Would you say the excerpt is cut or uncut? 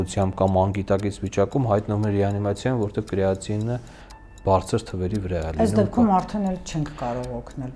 uncut